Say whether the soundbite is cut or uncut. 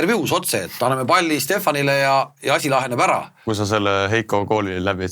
cut